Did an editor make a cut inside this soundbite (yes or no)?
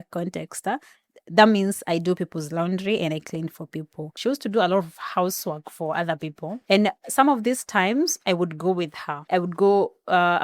yes